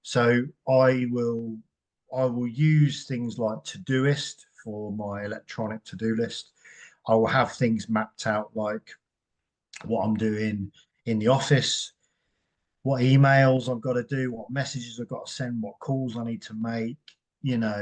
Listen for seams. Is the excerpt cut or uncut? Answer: uncut